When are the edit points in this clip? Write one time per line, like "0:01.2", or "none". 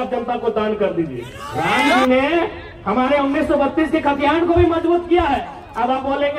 0:02.0